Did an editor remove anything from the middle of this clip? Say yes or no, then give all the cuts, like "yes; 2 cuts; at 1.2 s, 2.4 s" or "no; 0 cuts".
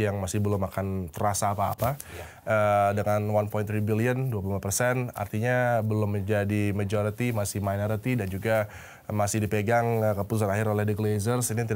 no; 0 cuts